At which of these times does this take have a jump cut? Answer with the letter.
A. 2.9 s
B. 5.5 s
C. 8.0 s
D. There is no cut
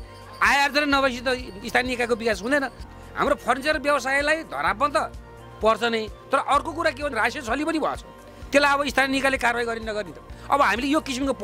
A